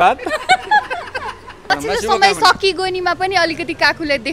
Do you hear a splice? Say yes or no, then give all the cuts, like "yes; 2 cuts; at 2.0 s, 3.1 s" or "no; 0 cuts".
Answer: yes; 1 cut; at 1.6 s